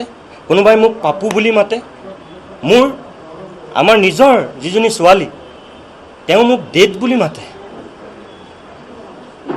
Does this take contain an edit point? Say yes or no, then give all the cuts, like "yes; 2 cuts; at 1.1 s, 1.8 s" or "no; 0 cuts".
no; 0 cuts